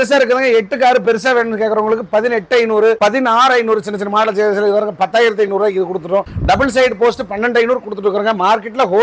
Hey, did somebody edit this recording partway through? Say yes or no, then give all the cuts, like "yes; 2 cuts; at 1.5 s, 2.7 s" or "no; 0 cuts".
no; 0 cuts